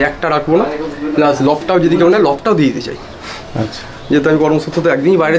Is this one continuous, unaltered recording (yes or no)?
yes